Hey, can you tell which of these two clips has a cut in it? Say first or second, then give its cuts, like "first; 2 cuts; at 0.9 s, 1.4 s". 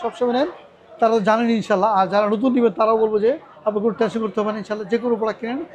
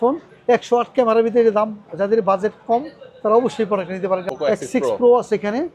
second; 1 cut; at 4.2 s